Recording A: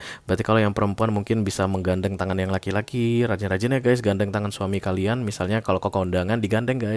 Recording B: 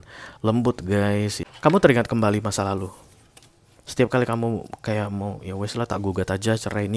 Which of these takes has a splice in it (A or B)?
B